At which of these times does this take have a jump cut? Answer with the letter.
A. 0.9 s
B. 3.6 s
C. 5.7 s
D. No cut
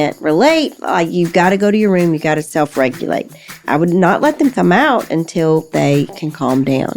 B